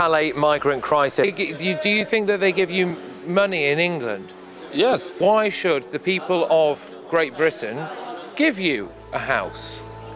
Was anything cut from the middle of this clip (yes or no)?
yes